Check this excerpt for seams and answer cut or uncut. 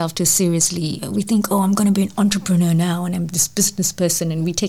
cut